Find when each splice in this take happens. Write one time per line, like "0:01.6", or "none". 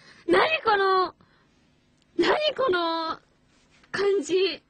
none